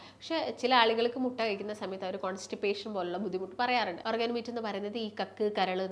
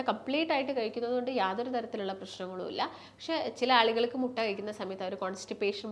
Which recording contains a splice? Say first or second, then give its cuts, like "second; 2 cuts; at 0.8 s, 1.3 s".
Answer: first; 1 cut; at 4.0 s